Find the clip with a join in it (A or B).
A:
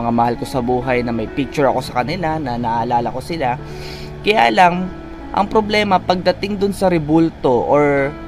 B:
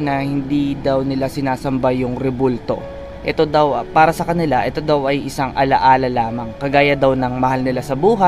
B